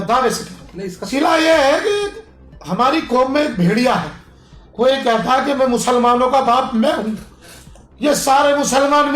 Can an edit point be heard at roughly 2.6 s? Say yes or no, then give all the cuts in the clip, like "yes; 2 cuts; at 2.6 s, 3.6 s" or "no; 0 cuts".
no; 1 cut; at 1.0 s